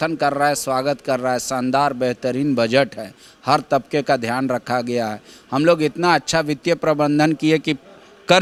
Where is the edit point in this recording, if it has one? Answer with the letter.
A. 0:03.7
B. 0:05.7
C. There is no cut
C